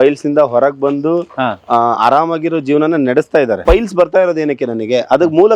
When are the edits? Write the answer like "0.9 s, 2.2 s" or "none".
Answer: 3.6 s